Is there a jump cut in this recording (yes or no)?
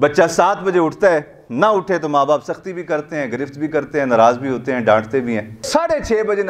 no